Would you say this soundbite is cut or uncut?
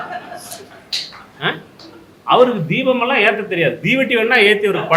uncut